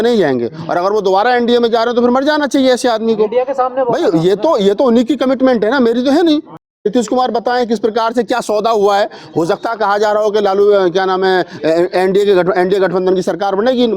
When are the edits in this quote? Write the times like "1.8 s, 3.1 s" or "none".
6.8 s